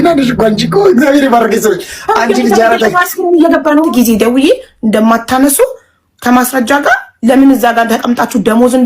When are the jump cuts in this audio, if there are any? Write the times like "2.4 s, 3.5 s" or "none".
3.9 s